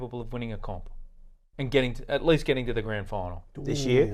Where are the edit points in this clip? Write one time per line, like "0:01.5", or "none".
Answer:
none